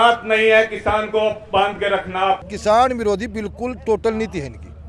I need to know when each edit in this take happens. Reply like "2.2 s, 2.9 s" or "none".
2.4 s